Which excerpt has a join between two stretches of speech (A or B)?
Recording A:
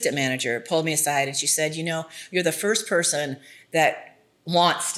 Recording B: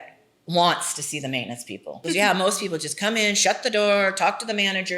B